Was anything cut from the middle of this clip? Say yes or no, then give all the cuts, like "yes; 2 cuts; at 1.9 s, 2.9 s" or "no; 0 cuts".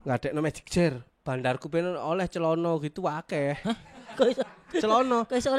yes; 1 cut; at 1.0 s